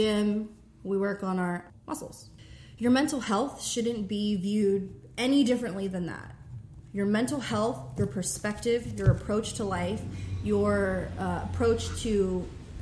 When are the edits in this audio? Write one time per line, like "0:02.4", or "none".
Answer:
0:01.9